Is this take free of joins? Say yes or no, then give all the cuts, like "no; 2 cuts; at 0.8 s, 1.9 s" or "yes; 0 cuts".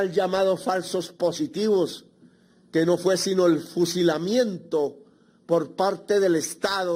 yes; 0 cuts